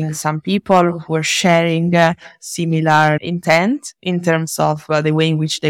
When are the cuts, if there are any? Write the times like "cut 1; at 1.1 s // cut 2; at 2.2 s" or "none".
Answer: none